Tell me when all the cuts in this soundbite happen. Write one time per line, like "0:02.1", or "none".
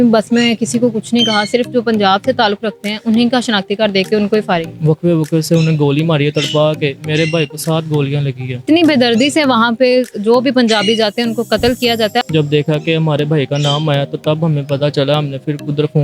0:04.7
0:08.5
0:12.2